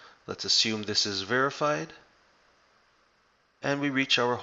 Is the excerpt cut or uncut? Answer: uncut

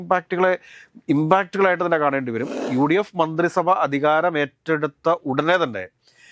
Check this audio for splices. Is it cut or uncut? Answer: cut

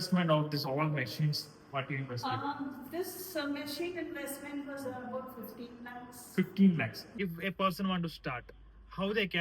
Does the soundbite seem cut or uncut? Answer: cut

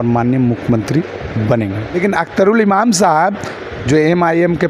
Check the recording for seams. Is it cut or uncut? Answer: cut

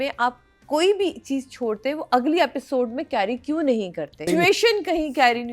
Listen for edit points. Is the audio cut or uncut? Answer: cut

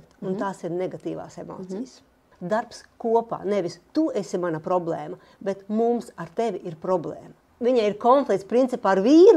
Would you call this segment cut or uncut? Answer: cut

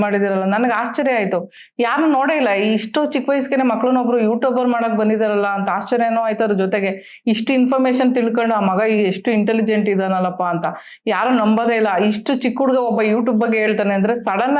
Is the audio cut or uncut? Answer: uncut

